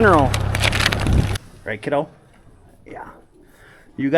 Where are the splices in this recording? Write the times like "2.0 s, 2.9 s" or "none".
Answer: 1.3 s